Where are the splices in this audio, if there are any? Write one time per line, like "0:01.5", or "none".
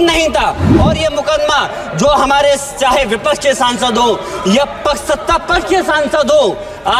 none